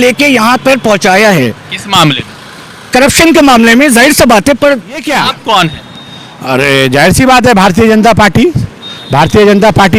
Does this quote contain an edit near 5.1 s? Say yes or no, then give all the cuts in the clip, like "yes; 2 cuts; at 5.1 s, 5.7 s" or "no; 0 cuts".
yes; 1 cut; at 5.1 s